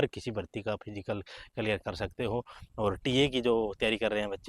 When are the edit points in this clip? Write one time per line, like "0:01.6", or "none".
none